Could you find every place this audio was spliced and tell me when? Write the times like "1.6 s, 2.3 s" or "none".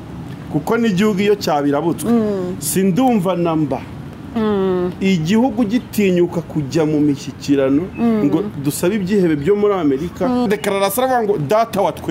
10.5 s